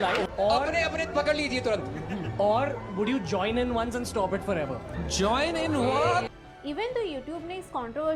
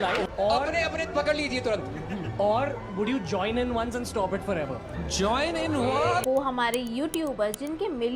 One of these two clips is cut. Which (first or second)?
second